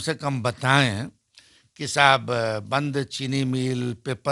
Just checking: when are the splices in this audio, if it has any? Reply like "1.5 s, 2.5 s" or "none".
none